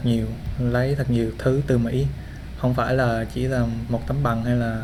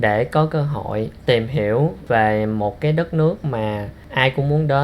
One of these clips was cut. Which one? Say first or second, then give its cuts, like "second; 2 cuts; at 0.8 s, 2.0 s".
second; 1 cut; at 2.0 s